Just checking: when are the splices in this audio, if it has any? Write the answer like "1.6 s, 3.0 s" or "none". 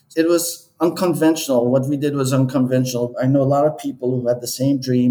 3.1 s